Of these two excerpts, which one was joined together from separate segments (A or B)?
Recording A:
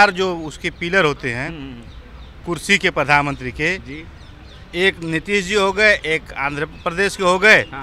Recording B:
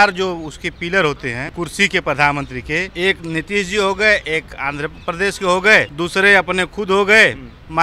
B